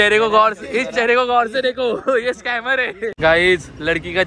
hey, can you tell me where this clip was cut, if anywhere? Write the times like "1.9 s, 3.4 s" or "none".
3.2 s